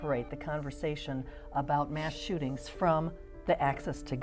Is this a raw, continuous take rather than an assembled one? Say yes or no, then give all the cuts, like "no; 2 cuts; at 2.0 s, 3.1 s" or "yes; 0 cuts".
yes; 0 cuts